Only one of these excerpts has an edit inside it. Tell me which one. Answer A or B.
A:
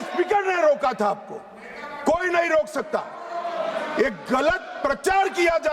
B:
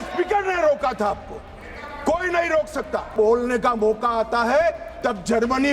B